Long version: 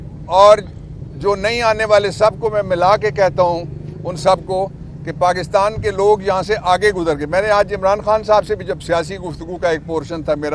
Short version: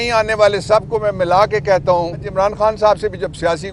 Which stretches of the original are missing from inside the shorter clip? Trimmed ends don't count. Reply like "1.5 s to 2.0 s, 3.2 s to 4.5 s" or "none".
3.8 s to 7.7 s